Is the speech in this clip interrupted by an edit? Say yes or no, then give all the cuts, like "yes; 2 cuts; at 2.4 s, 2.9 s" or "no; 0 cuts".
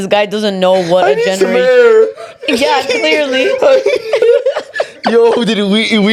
no; 0 cuts